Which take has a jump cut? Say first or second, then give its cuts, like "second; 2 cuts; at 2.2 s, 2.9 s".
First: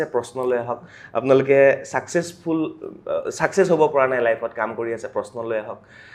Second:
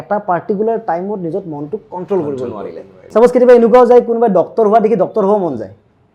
second; 1 cut; at 2.9 s